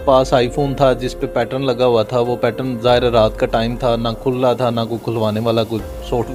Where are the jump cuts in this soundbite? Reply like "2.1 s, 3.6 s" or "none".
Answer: none

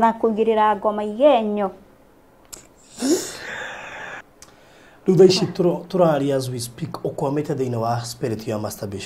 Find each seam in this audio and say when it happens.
4.2 s

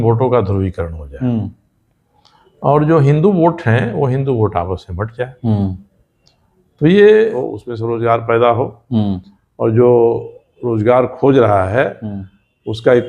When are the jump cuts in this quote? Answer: 7.5 s

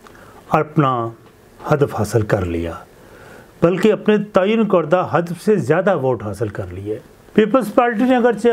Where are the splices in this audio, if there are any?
7.1 s

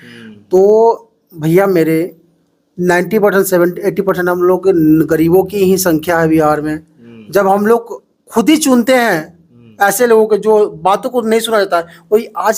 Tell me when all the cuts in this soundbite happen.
none

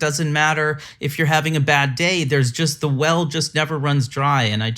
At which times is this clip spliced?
none

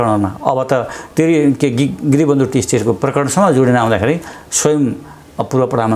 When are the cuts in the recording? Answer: none

